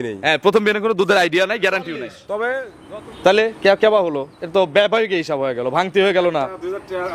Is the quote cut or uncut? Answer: cut